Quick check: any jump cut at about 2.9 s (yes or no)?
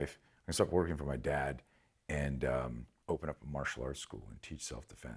yes